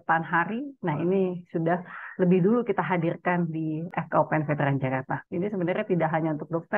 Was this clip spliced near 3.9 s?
yes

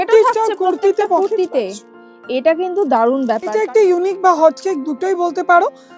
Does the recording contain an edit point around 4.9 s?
no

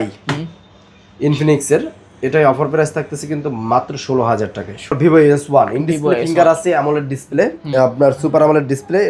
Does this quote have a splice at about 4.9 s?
yes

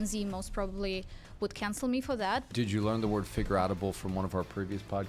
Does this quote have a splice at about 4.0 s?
no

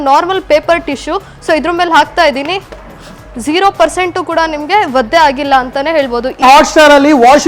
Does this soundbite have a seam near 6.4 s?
yes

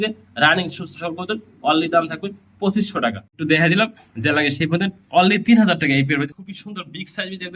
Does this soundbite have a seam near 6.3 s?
yes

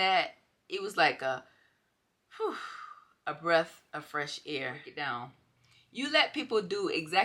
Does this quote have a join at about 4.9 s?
yes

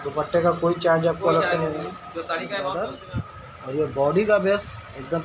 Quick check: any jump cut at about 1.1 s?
no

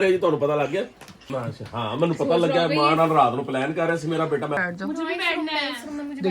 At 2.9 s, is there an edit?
no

